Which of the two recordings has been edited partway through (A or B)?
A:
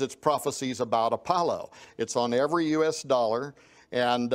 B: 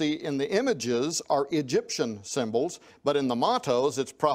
A